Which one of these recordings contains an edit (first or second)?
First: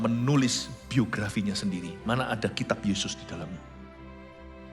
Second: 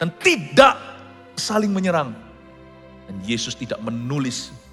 first